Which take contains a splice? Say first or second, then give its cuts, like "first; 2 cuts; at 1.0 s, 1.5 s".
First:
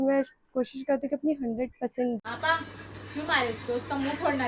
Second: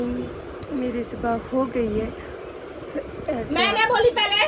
first; 1 cut; at 2.2 s